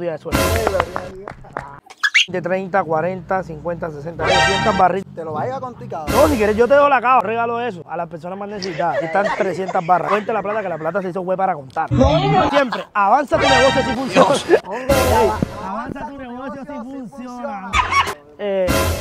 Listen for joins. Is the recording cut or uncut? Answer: cut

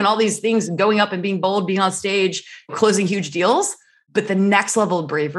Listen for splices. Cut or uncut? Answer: cut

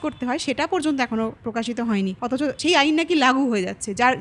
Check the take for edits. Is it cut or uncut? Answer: cut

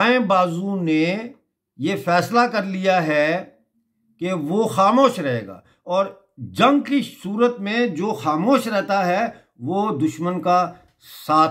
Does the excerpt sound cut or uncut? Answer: uncut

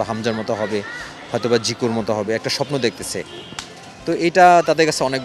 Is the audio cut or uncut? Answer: uncut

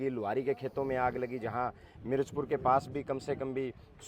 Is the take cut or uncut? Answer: uncut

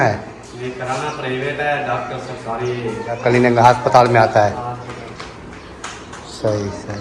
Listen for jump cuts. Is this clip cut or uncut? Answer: cut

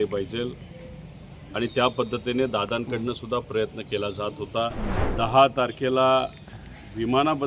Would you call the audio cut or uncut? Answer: cut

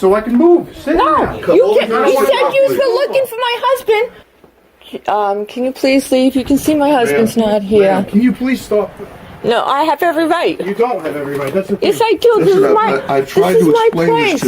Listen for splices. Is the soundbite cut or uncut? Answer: cut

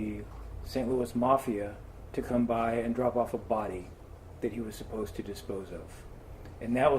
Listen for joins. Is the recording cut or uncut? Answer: cut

